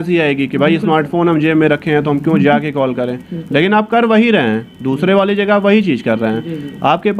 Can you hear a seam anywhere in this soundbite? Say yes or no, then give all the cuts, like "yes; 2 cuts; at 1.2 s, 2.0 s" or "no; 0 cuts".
no; 0 cuts